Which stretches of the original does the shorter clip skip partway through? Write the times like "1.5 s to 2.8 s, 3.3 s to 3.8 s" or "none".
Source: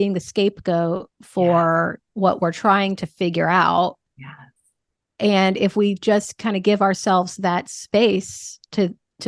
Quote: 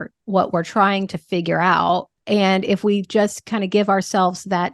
4.0 s to 5.1 s